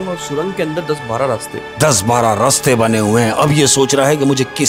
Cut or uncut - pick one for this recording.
uncut